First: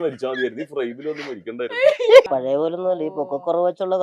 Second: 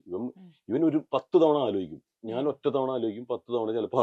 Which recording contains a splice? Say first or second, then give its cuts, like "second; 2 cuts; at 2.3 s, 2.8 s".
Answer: first; 1 cut; at 2.3 s